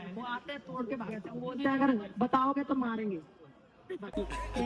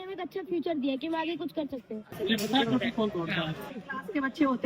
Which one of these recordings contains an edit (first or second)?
second